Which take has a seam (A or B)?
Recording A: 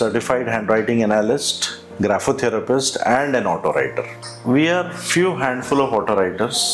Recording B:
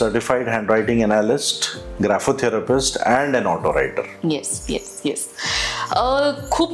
A